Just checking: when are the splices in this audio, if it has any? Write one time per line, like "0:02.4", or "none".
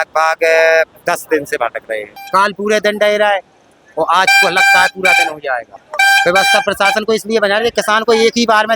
0:02.2
0:05.8